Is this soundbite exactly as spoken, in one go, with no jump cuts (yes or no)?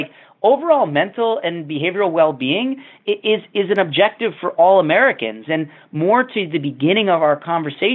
yes